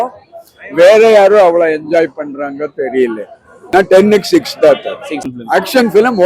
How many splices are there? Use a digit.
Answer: 2